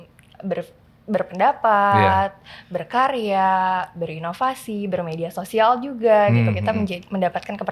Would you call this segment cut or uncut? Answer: uncut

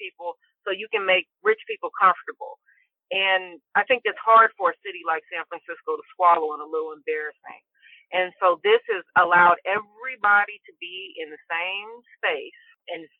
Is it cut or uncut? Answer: cut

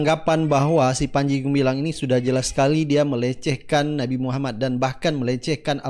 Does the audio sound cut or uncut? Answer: uncut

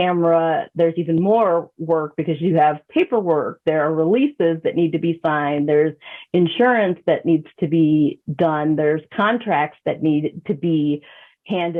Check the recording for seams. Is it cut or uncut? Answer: uncut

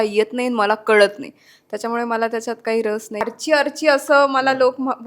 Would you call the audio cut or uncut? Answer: cut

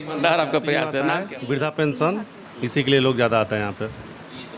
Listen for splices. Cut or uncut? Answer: cut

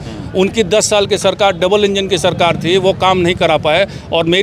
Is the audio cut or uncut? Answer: uncut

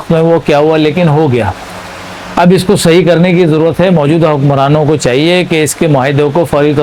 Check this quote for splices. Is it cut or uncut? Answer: uncut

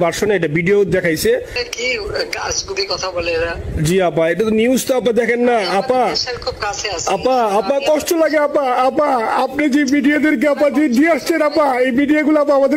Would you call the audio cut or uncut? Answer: cut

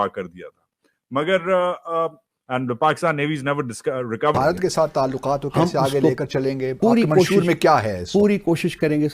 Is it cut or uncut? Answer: cut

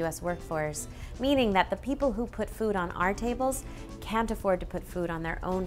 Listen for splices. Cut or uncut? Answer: uncut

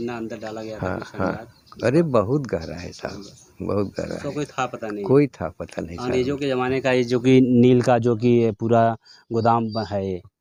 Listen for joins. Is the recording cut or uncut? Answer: uncut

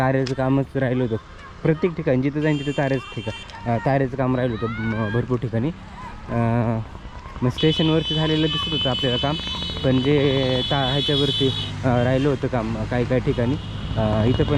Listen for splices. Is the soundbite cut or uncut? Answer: uncut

